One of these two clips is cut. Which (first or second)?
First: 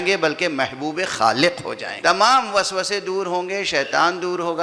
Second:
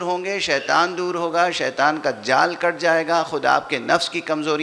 first